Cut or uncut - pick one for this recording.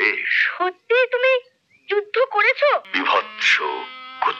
cut